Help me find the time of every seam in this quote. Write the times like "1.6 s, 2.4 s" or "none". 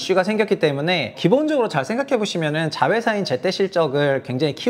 1.2 s